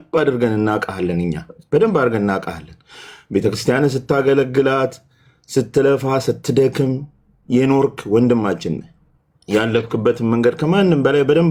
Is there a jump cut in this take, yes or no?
no